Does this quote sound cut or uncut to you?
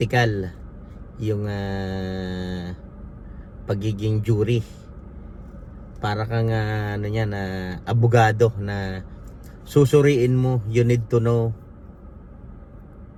uncut